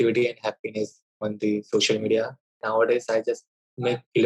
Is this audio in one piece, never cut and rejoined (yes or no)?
no